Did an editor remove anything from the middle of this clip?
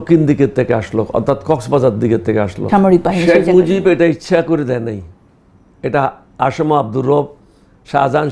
yes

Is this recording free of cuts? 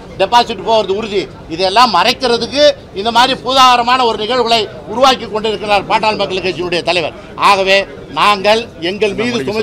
yes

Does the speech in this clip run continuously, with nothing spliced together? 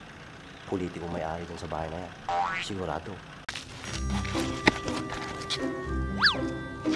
no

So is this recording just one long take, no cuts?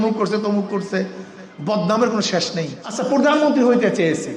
no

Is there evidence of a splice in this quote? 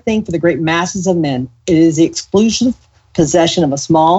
no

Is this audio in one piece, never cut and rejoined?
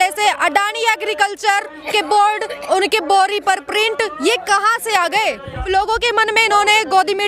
no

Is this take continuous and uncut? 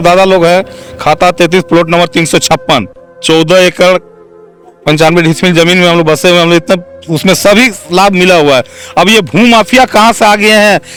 yes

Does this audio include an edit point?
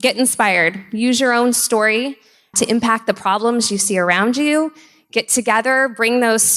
no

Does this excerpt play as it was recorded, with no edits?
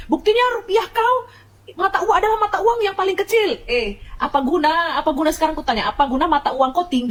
yes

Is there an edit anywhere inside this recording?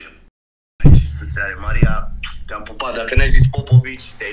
no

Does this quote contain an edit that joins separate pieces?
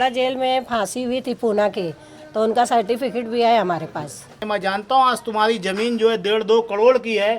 yes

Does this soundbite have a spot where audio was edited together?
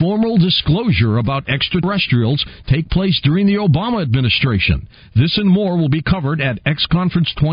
yes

